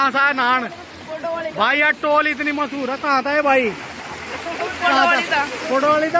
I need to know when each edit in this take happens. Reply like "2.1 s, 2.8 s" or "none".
none